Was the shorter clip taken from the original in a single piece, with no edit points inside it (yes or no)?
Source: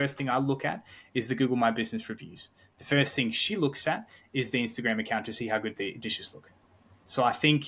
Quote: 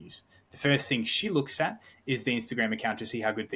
yes